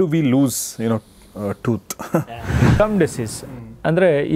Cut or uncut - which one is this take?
cut